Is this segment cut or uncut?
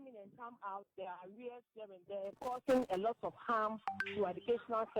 cut